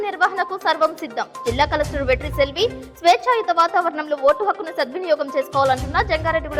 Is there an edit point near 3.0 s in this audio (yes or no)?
no